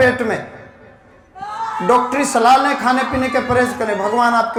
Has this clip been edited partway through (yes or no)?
no